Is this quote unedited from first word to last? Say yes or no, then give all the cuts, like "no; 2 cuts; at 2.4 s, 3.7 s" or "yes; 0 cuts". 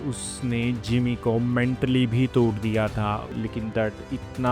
no; 1 cut; at 3.3 s